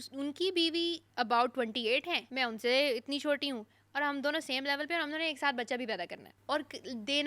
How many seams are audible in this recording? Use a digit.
3